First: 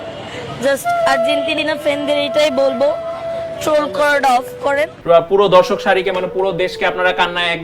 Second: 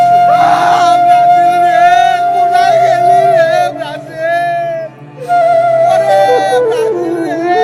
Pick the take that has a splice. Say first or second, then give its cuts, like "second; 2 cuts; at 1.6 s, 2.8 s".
first; 1 cut; at 4.9 s